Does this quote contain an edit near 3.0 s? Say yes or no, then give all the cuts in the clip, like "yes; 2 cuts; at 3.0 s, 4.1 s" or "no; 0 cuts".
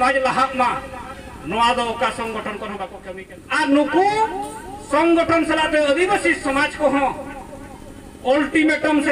yes; 1 cut; at 3.0 s